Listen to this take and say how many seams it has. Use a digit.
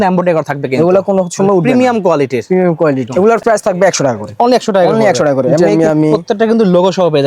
2